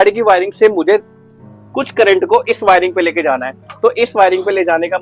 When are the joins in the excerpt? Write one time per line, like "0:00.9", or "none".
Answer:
none

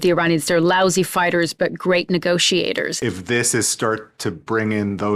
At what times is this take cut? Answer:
0:02.9

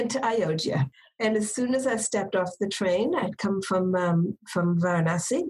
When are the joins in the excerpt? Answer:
0:00.9

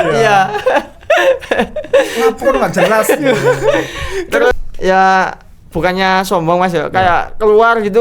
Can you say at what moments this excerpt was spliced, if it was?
0:04.5

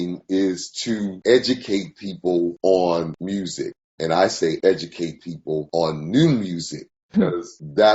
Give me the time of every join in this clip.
none

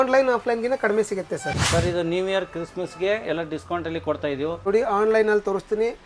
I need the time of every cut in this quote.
0:01.6
0:04.6

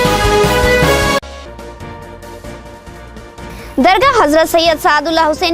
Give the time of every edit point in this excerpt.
0:01.3

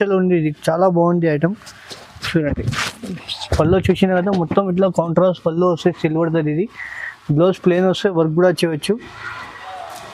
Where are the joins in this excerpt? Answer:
none

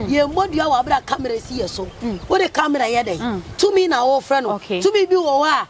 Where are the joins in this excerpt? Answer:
none

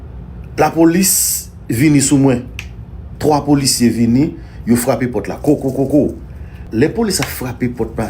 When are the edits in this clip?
0:06.6

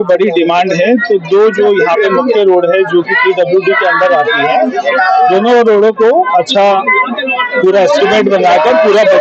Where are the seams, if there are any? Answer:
none

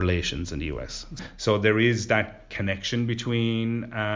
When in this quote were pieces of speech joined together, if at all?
0:01.2
0:02.5

